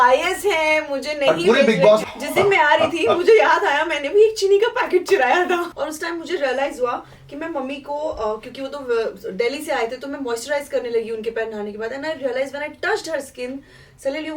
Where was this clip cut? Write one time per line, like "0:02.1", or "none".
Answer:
0:02.0
0:05.8